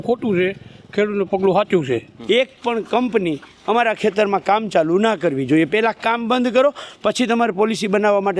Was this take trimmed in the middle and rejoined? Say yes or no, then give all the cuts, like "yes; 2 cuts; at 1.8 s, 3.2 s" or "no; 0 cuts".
yes; 1 cut; at 2.1 s